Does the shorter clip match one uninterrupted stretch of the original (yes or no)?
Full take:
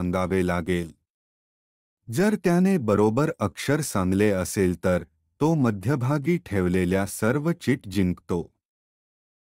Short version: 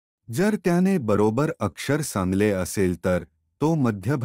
yes